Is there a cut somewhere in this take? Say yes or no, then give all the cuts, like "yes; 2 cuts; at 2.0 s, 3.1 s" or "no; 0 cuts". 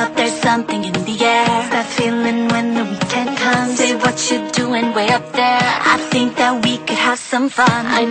yes; 1 cut; at 1.6 s